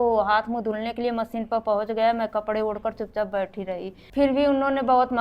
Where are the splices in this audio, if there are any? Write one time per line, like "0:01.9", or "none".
0:04.0